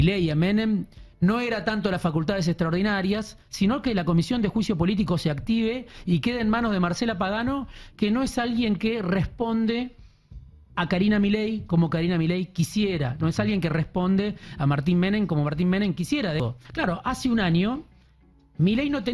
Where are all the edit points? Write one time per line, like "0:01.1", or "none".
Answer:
0:16.4